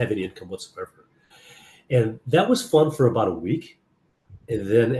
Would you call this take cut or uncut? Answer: uncut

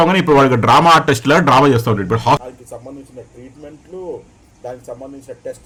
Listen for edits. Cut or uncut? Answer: uncut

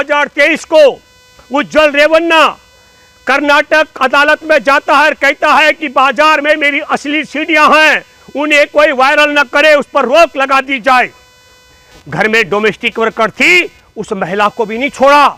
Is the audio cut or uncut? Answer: cut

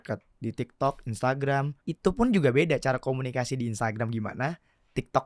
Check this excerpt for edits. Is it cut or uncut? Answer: cut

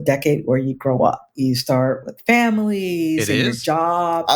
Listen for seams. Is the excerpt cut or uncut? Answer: cut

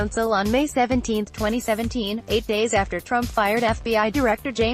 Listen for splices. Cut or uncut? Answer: uncut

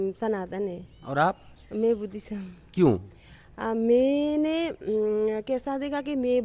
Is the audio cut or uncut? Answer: uncut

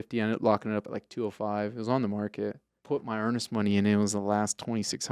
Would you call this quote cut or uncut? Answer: cut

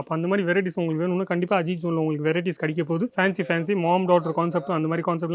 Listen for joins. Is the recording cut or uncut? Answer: uncut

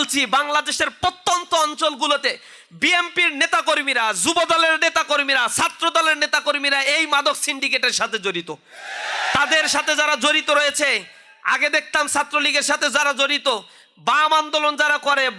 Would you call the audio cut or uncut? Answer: uncut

